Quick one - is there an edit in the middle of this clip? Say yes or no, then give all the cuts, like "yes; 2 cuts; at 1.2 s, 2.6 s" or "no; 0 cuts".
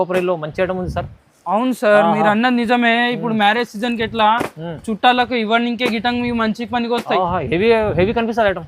no; 0 cuts